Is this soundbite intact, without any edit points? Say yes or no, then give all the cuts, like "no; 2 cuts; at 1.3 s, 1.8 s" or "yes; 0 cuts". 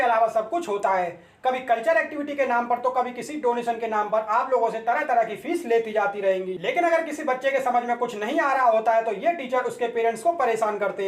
yes; 0 cuts